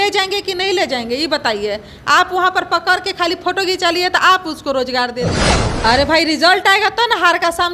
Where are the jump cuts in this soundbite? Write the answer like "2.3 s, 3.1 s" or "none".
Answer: 5.4 s